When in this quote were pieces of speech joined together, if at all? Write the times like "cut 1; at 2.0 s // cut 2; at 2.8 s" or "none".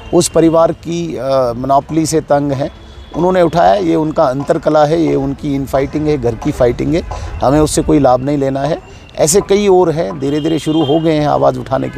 none